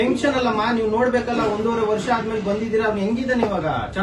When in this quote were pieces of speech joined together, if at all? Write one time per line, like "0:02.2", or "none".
none